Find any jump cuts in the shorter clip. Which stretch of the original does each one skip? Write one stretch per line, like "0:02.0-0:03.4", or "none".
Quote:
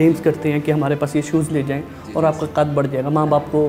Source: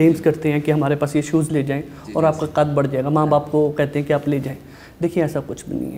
none

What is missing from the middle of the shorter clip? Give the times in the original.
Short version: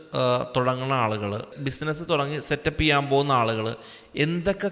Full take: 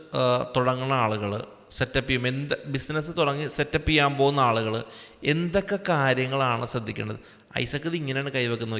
0:01.6-0:02.7

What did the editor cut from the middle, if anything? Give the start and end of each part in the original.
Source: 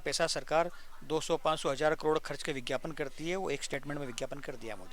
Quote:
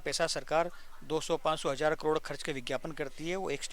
none

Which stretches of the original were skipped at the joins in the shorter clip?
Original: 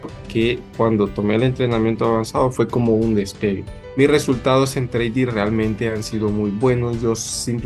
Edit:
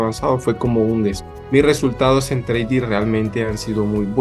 0:03.3-0:03.7

